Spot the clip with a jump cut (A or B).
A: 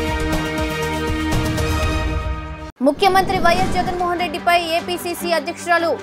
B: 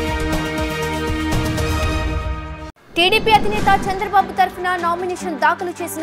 A